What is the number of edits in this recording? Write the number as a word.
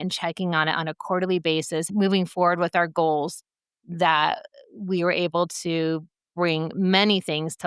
one